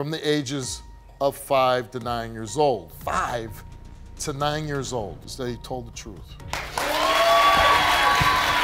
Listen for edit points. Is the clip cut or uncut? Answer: cut